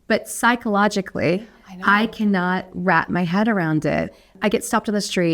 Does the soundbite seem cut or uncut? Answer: cut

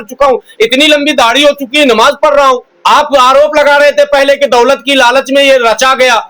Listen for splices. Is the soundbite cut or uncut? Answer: cut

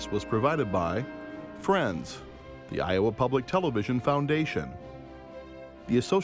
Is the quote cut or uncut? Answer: uncut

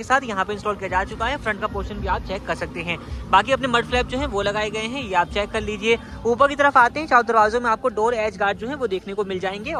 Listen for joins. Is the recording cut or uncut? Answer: uncut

